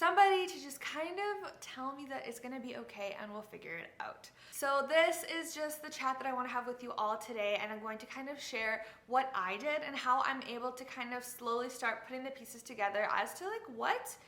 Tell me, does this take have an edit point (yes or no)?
no